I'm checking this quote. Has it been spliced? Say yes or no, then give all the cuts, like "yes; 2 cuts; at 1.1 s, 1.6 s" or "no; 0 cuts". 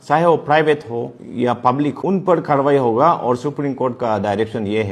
yes; 2 cuts; at 1.2 s, 1.9 s